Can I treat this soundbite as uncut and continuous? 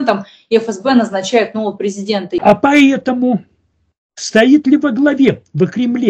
no; 1 cut; at 2.4 s

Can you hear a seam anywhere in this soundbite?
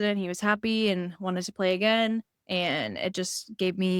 yes; 1 cut; at 2.4 s

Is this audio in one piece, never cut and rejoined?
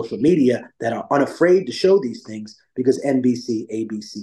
yes; 0 cuts

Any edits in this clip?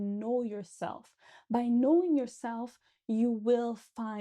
no; 0 cuts

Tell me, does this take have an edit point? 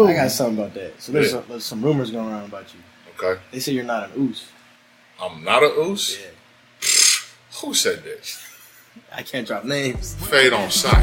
no; 0 cuts

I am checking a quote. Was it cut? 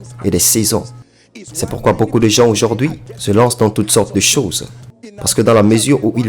no; 0 cuts

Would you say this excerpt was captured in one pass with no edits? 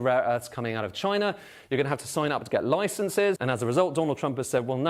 no; 1 cut; at 3.4 s

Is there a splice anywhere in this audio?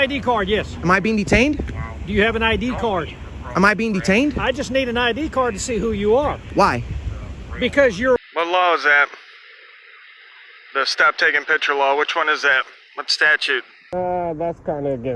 yes; 2 cuts; at 8.2 s, 13.8 s

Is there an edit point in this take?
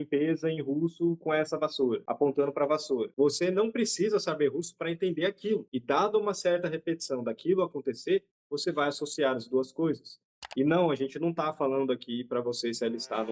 no; 0 cuts

